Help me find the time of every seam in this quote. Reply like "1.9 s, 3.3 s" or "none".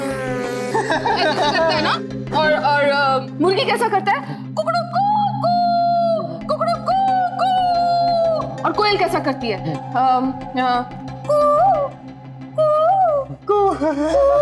8.5 s